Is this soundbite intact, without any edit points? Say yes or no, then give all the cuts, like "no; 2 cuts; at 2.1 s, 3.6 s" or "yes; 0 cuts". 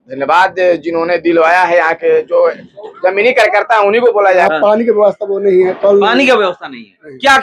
no; 1 cut; at 4.4 s